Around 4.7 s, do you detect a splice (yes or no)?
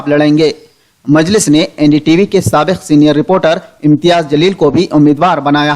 yes